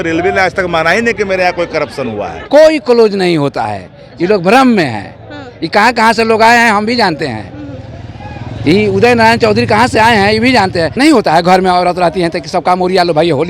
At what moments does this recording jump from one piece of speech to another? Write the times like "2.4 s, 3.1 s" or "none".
2.3 s, 10.9 s